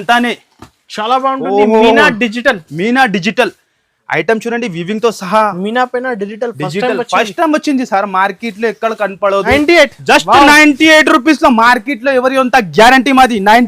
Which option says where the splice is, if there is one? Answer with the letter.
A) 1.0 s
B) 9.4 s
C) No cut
B